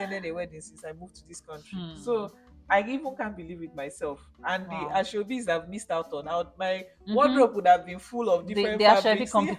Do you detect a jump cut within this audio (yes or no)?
no